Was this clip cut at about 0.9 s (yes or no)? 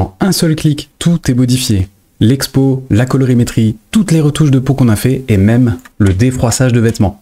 yes